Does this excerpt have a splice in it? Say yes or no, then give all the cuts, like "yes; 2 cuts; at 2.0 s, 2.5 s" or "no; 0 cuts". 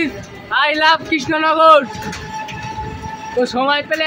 no; 0 cuts